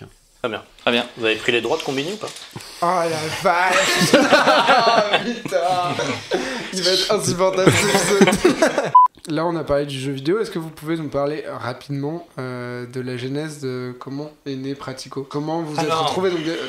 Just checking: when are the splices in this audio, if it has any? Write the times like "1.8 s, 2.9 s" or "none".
8.9 s, 15.3 s